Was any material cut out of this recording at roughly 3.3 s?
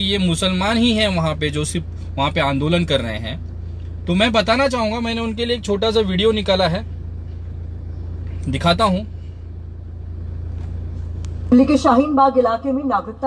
no; 0 cuts

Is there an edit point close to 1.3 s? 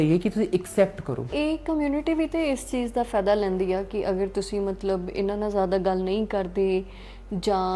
yes; 1 cut; at 1.3 s

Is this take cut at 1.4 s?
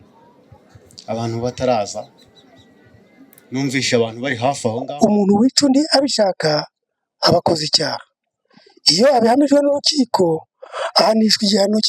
no; 1 cut; at 4.8 s

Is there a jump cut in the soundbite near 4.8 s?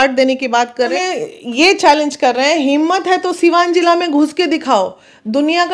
no; 1 cut; at 0.9 s

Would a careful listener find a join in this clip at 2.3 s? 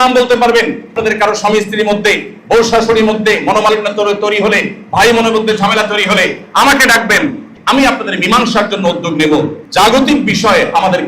no; 3 cuts; at 1.0 s, 7.5 s, 9.6 s

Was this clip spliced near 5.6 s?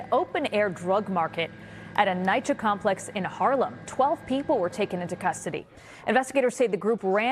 no; 0 cuts

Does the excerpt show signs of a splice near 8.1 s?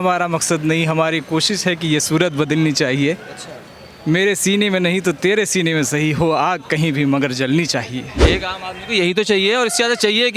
yes; 1 cut; at 8.1 s

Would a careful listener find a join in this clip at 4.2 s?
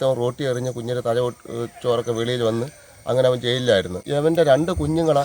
yes; 1 cut; at 4.2 s

